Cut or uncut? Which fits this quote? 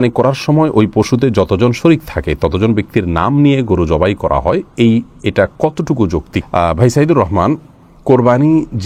uncut